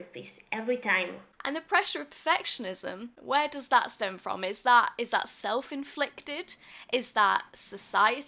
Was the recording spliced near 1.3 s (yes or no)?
yes